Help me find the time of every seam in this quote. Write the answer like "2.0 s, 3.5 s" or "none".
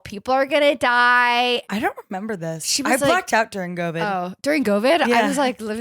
1.7 s